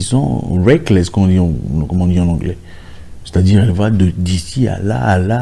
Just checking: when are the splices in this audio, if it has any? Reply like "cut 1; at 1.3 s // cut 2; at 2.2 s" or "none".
none

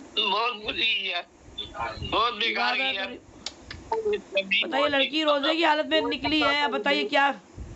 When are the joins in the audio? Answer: none

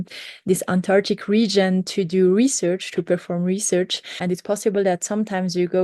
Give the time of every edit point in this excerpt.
cut 1; at 4.2 s

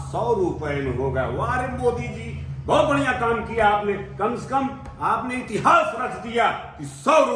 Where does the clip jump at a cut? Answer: none

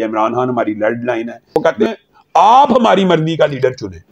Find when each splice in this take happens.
cut 1; at 1.5 s

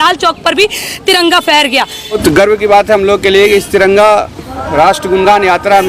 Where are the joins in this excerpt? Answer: cut 1; at 2.2 s

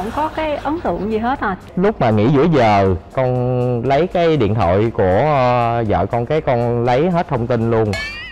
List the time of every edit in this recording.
cut 1; at 1.6 s

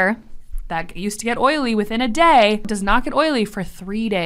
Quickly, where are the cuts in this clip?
cut 1; at 2.7 s

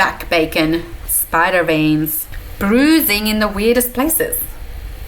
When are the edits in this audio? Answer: cut 1; at 1.0 s

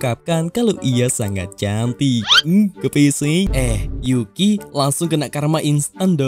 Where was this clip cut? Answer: cut 1; at 3.5 s

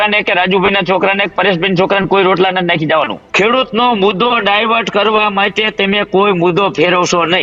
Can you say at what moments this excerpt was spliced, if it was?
cut 1; at 3.2 s

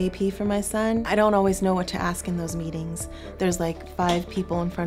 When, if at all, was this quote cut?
cut 1; at 1.0 s

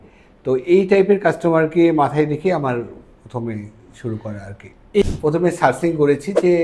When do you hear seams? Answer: cut 1; at 5.0 s

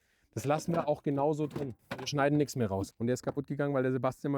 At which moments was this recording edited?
cut 1; at 1.7 s // cut 2; at 2.9 s

